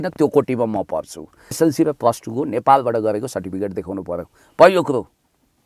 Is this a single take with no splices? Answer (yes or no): no